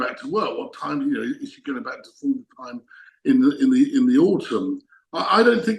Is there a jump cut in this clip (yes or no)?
no